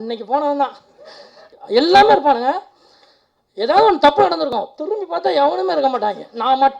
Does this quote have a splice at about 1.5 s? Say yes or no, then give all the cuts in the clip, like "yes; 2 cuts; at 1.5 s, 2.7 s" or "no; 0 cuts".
yes; 1 cut; at 1.5 s